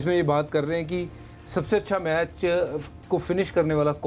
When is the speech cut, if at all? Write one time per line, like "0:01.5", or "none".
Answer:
none